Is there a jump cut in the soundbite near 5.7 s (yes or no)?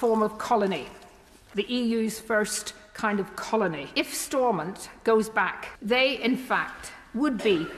yes